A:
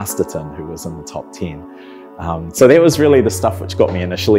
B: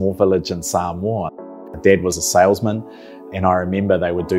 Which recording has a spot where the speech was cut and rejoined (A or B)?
B